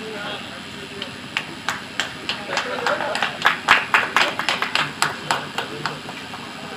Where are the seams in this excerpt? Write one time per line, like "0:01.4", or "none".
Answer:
none